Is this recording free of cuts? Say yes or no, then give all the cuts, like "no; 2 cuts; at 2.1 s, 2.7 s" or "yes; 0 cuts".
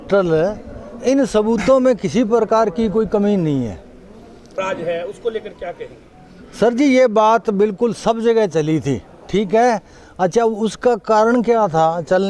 no; 1 cut; at 4.6 s